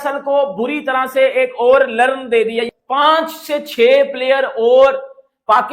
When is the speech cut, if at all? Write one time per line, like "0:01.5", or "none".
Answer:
0:02.7